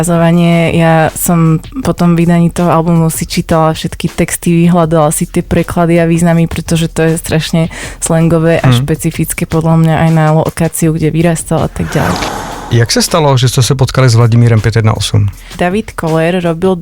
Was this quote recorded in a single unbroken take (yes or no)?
no